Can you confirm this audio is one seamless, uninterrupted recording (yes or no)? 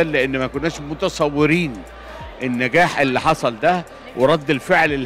yes